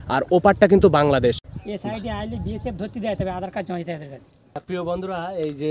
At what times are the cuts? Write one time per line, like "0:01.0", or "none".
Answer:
0:01.5
0:04.6